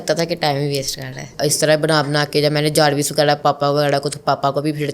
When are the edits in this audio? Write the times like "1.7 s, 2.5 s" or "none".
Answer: 1.3 s